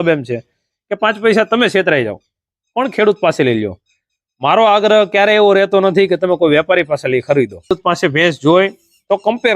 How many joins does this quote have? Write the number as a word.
one